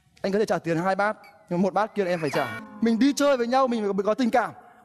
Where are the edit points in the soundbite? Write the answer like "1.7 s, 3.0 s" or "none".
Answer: 2.6 s